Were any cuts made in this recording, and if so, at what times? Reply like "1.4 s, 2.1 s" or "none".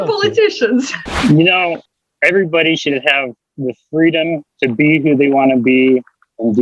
1.0 s, 1.9 s